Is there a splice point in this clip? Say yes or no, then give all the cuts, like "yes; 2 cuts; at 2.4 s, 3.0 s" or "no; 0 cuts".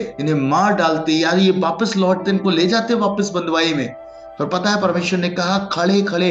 no; 0 cuts